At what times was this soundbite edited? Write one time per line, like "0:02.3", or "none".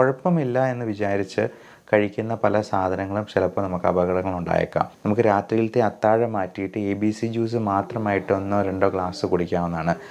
0:05.0

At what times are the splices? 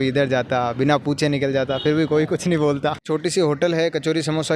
0:03.0

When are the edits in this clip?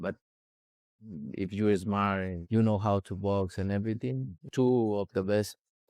0:04.2

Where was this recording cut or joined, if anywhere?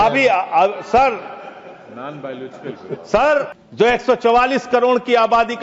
0:03.6

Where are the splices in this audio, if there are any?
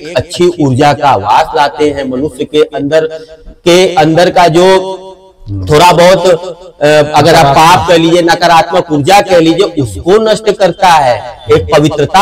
none

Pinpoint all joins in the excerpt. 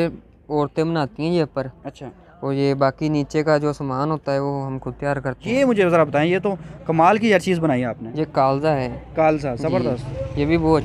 0:05.3

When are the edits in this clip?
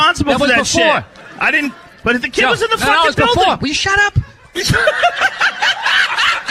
none

